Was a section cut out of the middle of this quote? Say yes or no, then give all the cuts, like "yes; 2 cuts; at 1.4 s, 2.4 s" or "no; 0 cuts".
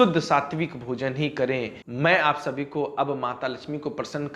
yes; 1 cut; at 1.9 s